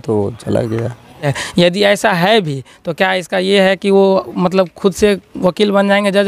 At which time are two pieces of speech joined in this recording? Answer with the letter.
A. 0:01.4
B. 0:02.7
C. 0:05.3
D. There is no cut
A